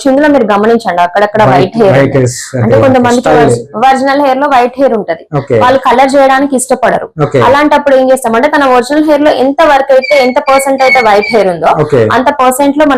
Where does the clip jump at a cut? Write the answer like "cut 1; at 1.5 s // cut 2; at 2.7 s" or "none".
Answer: none